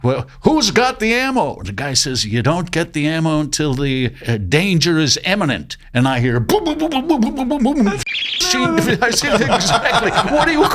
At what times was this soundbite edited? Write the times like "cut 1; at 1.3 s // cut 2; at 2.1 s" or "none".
none